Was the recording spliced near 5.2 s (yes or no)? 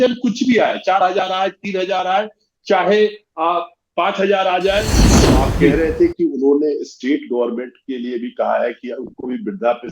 yes